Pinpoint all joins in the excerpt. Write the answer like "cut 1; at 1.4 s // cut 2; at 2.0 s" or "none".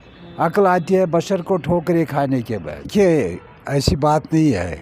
cut 1; at 2.9 s